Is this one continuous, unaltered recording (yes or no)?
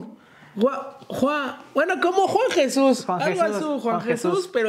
yes